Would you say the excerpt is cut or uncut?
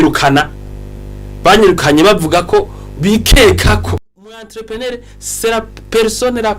cut